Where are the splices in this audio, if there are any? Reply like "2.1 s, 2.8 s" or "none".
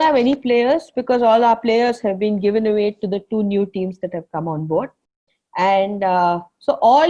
none